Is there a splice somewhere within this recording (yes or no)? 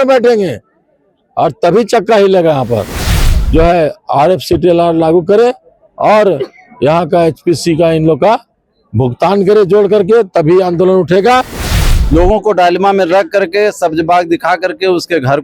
yes